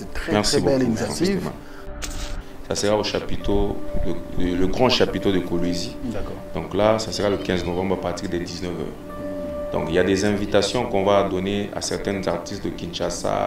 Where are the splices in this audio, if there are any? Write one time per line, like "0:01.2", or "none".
0:02.1